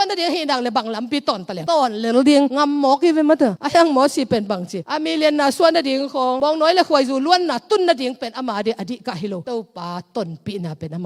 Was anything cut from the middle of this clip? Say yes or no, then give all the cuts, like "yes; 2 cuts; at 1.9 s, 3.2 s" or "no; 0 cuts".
no; 0 cuts